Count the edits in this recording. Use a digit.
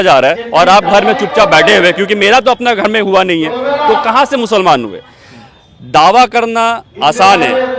0